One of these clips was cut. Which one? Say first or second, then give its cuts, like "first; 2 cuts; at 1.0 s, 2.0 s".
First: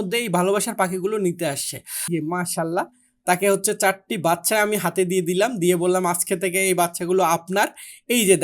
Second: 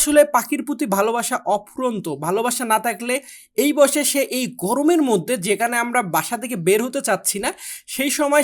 first; 1 cut; at 2.1 s